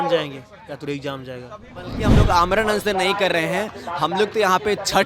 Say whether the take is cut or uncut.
cut